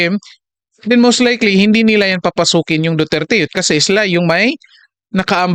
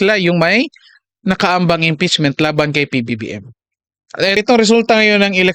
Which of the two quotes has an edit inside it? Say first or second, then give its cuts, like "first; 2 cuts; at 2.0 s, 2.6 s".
second; 1 cut; at 4.4 s